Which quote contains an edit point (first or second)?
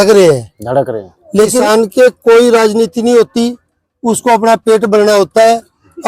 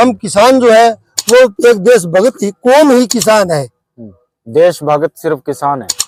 first